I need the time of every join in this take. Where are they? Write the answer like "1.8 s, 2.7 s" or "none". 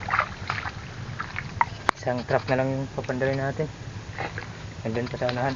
1.6 s